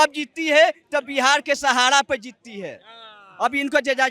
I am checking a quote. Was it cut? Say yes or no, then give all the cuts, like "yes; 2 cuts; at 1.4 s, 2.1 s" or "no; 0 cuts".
no; 0 cuts